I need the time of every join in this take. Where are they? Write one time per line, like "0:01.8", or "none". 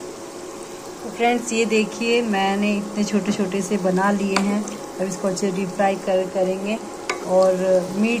none